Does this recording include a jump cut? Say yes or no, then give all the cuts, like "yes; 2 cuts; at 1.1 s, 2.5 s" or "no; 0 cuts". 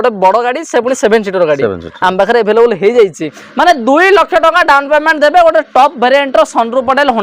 yes; 1 cut; at 3.4 s